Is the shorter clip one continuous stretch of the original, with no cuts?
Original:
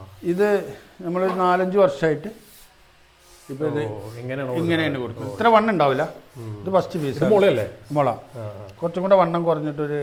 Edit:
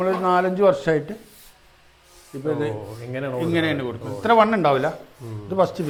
yes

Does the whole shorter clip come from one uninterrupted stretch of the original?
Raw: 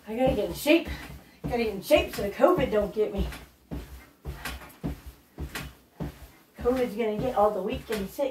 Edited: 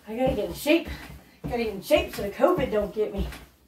yes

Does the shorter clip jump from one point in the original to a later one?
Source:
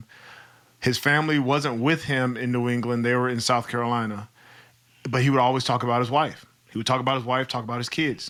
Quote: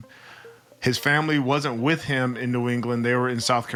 no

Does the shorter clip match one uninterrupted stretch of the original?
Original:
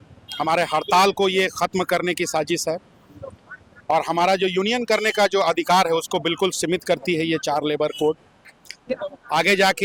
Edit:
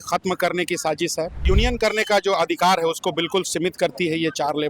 no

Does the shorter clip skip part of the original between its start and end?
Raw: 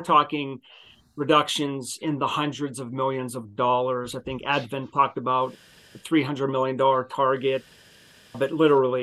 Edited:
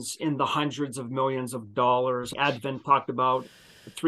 yes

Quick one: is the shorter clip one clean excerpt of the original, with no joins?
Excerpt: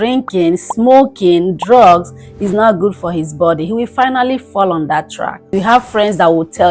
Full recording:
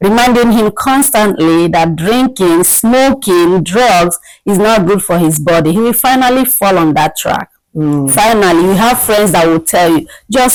no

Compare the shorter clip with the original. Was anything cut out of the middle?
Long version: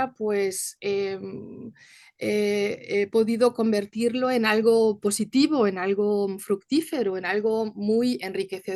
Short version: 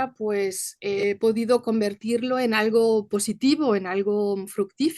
yes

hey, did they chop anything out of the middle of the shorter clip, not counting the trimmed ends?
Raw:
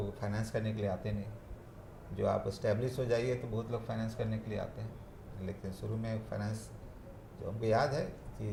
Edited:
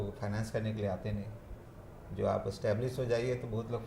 no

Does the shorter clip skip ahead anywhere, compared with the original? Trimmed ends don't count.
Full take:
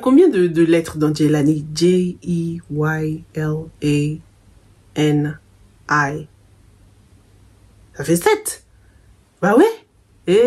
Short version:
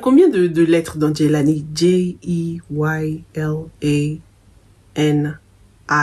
no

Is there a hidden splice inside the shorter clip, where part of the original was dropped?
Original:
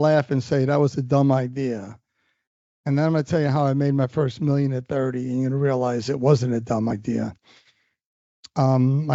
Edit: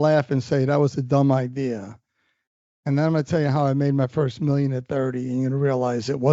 no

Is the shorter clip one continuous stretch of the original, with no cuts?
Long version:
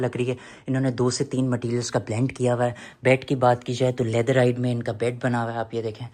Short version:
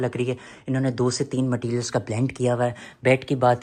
yes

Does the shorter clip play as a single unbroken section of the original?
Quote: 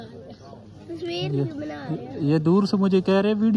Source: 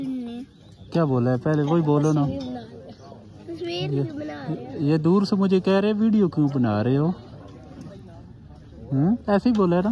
yes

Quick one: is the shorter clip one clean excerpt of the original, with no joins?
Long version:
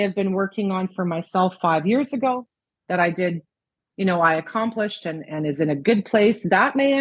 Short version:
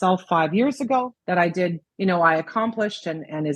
no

